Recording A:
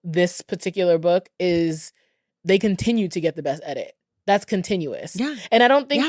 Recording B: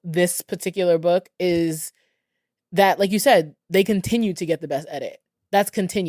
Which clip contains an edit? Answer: A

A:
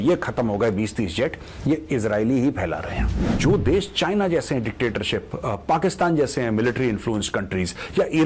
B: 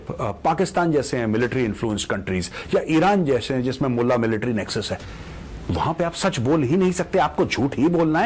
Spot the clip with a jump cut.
A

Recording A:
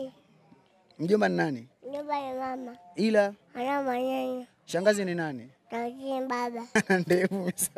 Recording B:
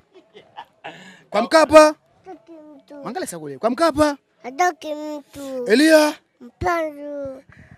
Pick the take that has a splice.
A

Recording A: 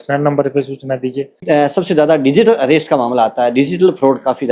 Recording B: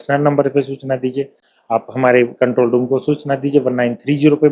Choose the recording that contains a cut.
A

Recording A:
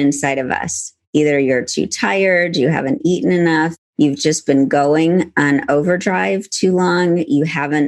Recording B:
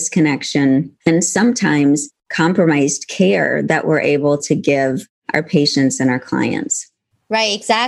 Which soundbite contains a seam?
B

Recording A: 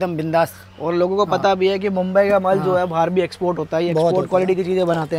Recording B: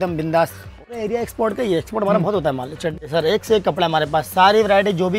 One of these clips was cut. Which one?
B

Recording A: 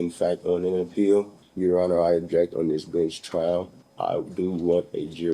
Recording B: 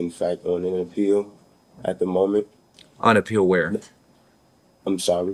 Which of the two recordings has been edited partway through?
A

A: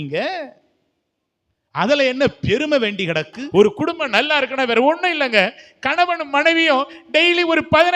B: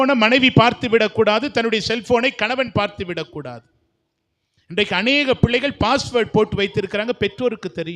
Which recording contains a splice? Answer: A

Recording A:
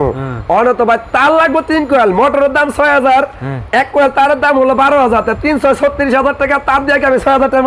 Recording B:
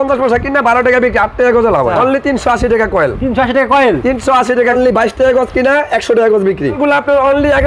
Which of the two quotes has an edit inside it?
B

